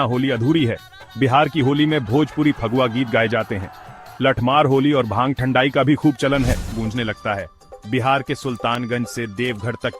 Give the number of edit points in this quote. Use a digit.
1